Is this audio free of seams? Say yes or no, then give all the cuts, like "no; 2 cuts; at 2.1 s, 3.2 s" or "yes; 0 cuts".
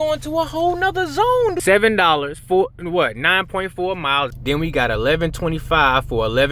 no; 2 cuts; at 1.6 s, 4.3 s